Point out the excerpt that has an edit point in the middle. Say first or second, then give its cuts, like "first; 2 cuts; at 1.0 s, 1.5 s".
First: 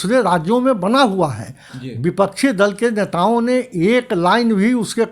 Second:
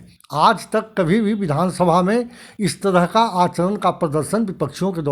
first; 1 cut; at 1.7 s